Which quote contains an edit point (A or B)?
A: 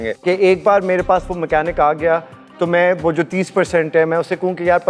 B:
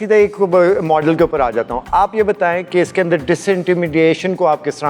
A